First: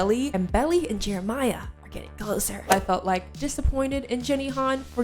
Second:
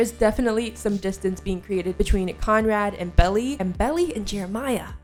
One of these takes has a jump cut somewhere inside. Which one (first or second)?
first